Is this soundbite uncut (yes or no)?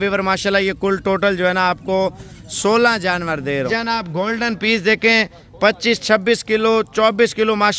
no